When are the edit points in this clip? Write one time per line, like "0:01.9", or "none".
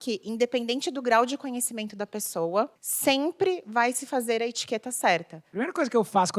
0:02.8
0:05.4